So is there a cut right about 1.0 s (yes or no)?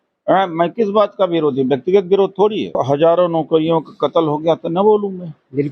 no